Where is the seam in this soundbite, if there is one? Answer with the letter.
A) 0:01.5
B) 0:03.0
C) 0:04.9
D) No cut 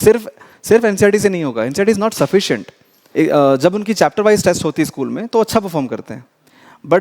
B